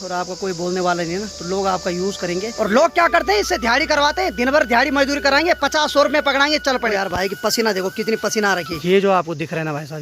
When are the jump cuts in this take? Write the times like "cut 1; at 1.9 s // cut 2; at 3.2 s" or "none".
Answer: cut 1; at 2.5 s // cut 2; at 6.9 s // cut 3; at 8.7 s